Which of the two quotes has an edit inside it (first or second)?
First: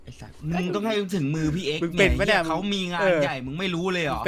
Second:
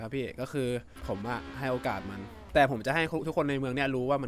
second